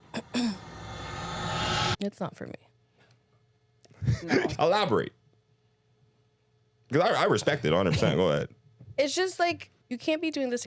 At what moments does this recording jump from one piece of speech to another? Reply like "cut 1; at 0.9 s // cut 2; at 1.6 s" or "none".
cut 1; at 4.5 s // cut 2; at 9.7 s